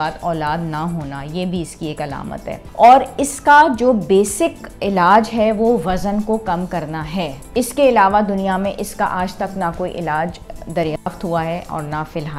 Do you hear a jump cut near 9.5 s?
no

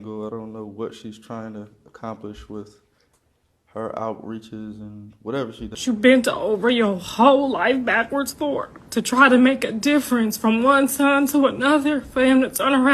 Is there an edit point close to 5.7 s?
yes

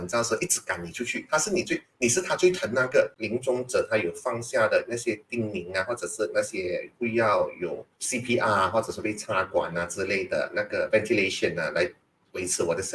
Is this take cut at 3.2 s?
yes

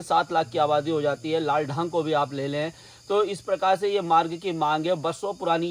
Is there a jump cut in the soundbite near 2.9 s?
no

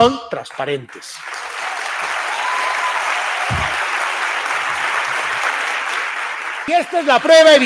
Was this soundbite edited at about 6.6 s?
yes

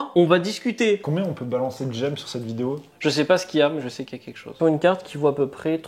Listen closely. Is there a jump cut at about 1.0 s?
yes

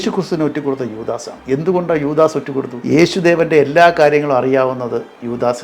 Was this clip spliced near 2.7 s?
yes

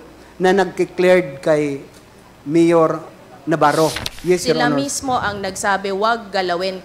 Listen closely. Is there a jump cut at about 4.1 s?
yes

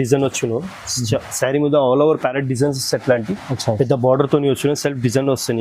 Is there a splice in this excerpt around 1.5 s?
no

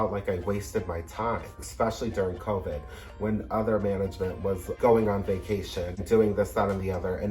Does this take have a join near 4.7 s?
yes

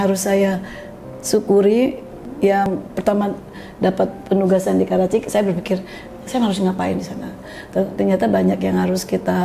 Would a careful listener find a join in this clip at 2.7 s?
yes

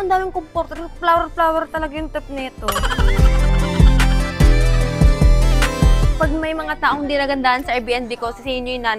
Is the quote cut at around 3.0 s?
no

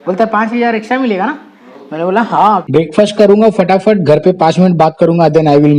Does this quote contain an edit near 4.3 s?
no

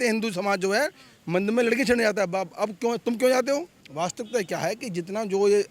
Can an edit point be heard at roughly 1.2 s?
no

